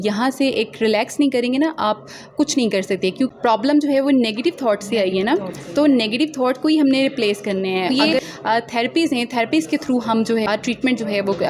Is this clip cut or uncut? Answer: cut